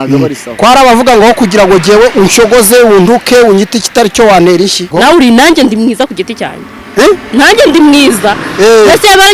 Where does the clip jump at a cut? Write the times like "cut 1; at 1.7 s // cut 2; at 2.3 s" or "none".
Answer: cut 1; at 4.9 s

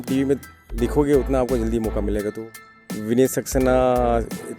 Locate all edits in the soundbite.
cut 1; at 2.4 s

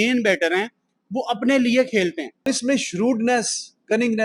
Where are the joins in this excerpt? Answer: cut 1; at 2.5 s

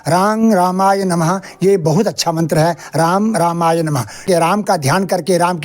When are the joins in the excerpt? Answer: cut 1; at 4.2 s

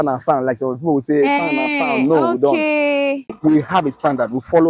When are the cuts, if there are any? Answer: cut 1; at 3.3 s

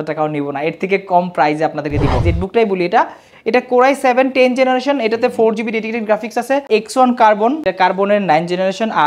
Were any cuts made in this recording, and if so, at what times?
cut 1; at 2.3 s // cut 2; at 6.7 s // cut 3; at 7.6 s

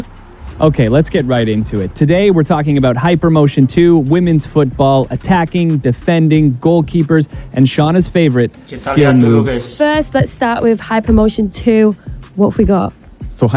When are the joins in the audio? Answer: cut 1; at 2.5 s // cut 2; at 6.7 s // cut 3; at 11.0 s // cut 4; at 12.4 s

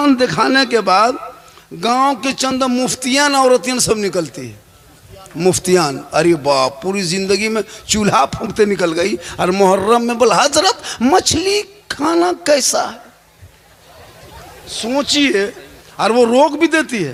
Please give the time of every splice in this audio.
none

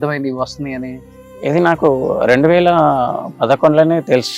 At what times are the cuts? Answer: none

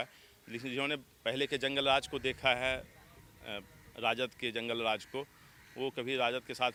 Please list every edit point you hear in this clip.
none

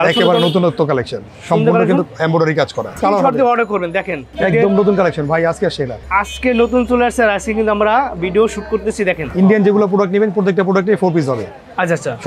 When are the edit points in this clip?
cut 1; at 3.0 s // cut 2; at 4.2 s // cut 3; at 6.0 s // cut 4; at 9.3 s

